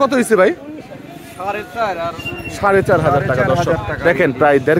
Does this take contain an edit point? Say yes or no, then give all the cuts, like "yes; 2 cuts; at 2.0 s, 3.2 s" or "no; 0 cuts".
no; 0 cuts